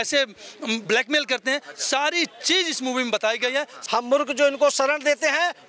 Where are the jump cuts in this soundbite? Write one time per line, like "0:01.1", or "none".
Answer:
0:03.8